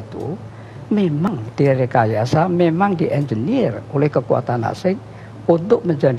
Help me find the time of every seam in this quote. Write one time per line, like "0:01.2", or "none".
0:01.3